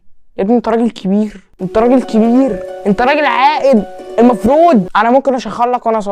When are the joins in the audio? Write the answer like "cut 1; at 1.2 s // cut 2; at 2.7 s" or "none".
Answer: cut 1; at 4.9 s